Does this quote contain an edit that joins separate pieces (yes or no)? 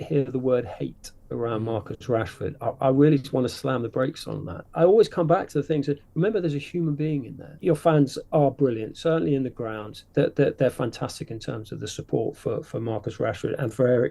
yes